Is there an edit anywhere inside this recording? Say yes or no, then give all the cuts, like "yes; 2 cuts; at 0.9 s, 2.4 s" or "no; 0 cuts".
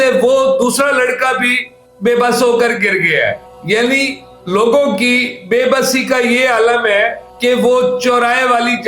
no; 0 cuts